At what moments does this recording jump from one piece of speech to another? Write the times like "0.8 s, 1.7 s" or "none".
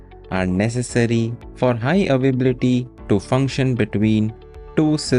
1.4 s, 2.9 s